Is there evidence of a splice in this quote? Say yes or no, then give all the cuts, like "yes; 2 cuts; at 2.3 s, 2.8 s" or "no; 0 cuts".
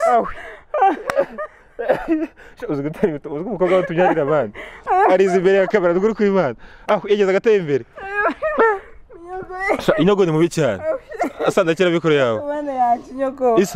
no; 0 cuts